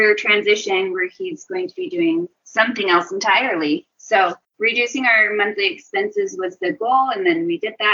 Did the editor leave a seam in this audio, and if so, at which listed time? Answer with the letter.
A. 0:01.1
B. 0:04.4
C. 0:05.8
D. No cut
B